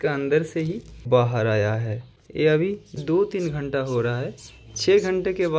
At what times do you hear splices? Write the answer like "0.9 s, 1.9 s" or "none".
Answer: 1.0 s